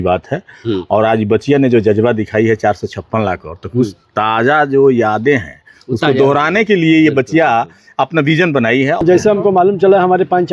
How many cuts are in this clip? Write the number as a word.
one